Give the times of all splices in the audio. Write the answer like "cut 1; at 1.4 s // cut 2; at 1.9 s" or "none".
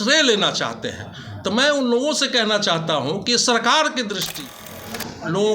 cut 1; at 4.6 s